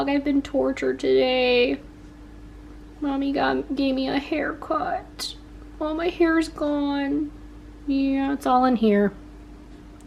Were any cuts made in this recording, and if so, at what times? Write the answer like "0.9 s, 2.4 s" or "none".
none